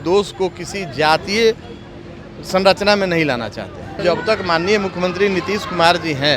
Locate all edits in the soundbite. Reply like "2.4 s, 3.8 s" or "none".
4.0 s

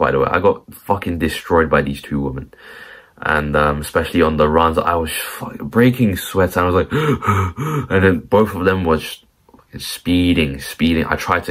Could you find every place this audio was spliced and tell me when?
none

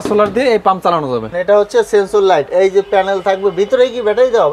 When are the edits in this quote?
1.3 s

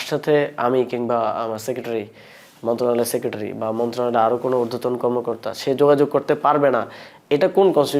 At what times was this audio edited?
none

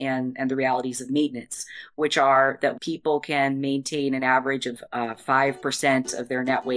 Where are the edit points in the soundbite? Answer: 2.8 s, 4.7 s

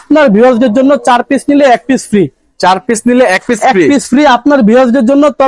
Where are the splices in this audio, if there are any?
none

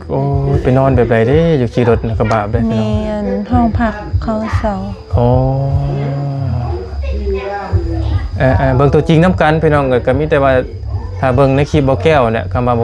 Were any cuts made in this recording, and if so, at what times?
none

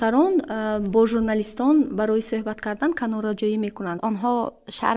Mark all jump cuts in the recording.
4.0 s

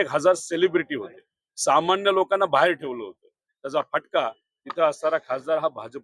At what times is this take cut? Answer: none

